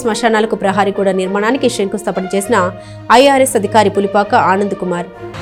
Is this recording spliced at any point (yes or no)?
no